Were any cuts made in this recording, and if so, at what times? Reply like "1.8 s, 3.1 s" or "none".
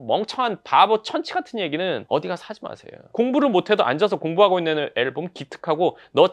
2.0 s, 3.0 s